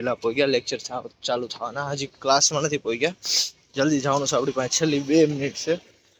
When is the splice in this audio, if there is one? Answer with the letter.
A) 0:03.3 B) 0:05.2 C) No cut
C